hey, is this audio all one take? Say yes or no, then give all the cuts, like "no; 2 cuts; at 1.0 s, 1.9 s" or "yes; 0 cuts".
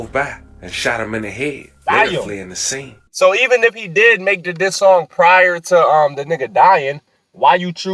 no; 1 cut; at 3.0 s